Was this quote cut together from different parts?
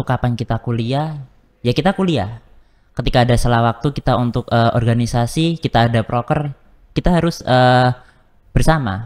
no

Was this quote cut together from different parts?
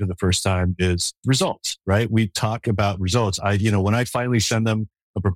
yes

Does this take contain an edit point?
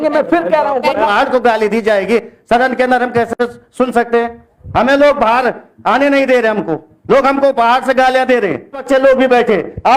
yes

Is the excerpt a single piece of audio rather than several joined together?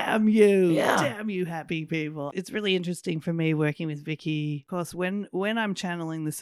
no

